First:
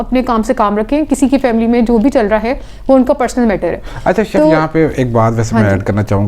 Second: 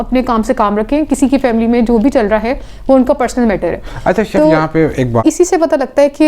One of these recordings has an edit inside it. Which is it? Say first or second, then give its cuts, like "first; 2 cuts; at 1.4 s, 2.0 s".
second; 1 cut; at 5.2 s